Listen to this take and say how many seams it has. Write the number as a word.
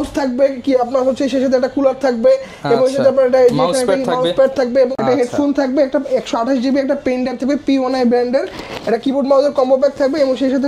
one